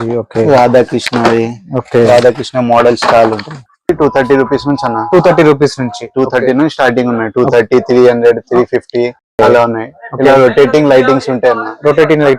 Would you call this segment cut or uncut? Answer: cut